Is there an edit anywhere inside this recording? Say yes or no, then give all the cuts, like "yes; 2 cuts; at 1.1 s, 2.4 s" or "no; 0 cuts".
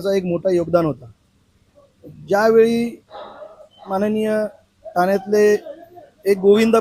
no; 0 cuts